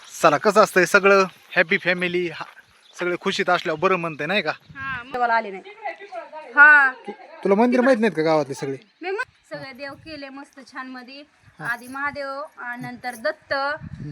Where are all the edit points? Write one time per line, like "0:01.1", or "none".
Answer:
0:05.1
0:09.3